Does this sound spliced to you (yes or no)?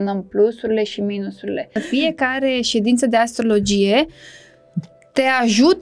yes